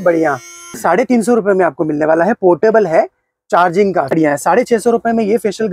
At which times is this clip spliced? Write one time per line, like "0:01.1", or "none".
0:00.8
0:04.1